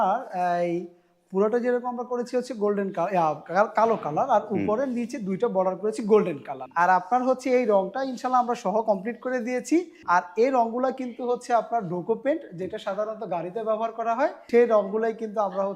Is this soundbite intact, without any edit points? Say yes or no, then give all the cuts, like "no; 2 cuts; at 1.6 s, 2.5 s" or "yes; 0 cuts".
no; 3 cuts; at 6.6 s, 10.0 s, 14.4 s